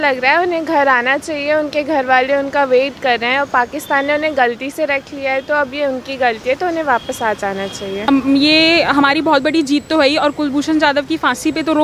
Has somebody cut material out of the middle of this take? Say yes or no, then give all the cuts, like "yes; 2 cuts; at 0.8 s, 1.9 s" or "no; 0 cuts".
yes; 1 cut; at 8.0 s